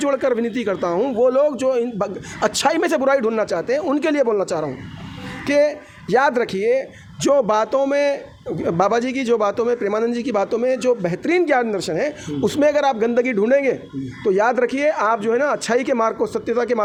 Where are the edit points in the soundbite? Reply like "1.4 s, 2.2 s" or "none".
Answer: none